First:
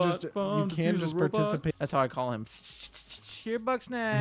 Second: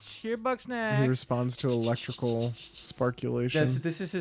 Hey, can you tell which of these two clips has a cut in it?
first; 1 cut; at 1.7 s

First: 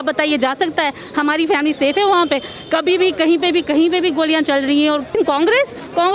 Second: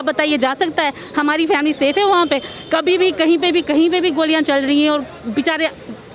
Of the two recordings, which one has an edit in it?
first; 1 cut; at 5.1 s

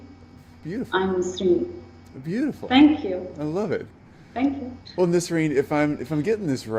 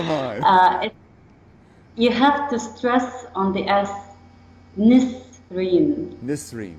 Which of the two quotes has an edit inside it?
first; 1 cut; at 2.8 s

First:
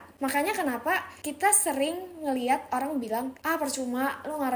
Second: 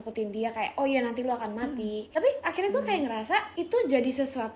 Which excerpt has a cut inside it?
second; 1 cut; at 2.0 s

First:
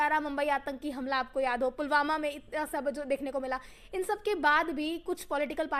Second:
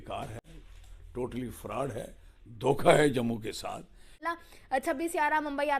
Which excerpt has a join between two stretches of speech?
second; 1 cut; at 4.2 s

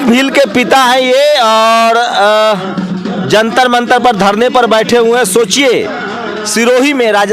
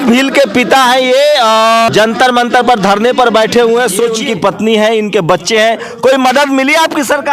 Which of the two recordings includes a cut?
second; 2 cuts; at 1.9 s, 4.2 s

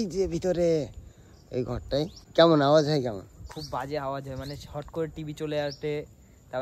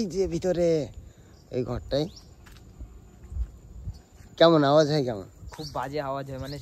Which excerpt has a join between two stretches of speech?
first; 1 cut; at 2.2 s

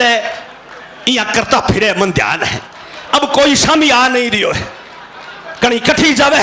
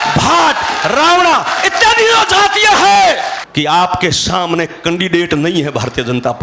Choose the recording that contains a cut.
second; 1 cut; at 3.3 s

